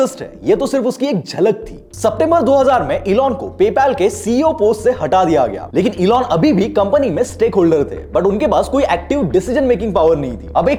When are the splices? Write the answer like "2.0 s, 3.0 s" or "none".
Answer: none